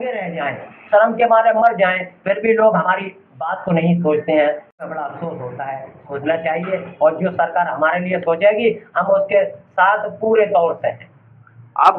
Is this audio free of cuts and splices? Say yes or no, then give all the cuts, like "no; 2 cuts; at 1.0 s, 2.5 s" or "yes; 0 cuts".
yes; 0 cuts